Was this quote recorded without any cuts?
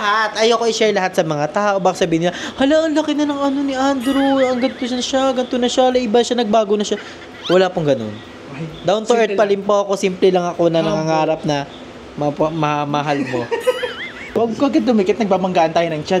no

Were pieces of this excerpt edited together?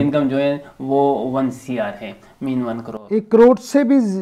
no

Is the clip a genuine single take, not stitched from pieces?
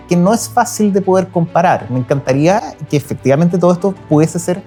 yes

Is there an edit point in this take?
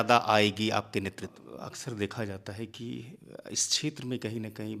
yes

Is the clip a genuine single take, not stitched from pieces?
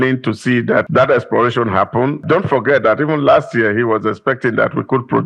no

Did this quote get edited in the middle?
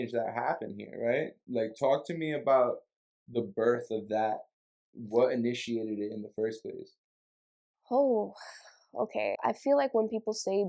yes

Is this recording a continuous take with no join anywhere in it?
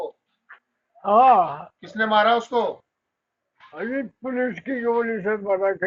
yes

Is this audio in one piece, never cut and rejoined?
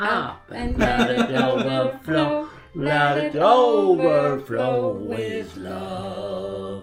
yes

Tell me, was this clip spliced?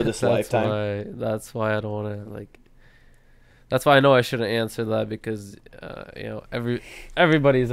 no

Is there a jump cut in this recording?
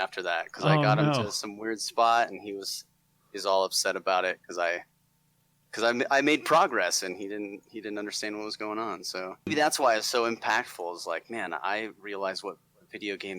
yes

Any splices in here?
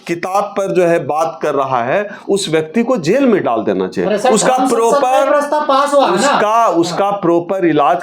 no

